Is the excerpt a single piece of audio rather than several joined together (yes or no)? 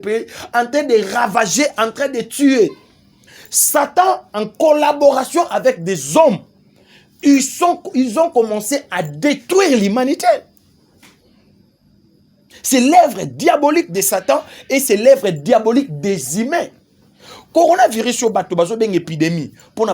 yes